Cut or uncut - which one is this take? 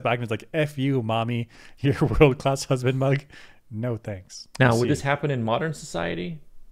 cut